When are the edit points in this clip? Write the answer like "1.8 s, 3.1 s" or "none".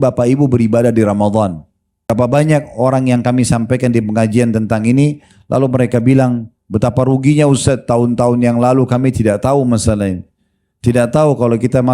2.1 s